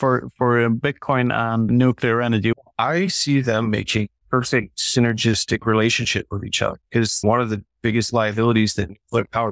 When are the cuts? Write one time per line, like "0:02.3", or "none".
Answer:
0:01.7
0:02.5
0:04.6
0:07.2